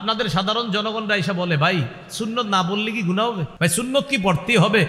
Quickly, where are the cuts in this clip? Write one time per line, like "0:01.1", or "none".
0:03.5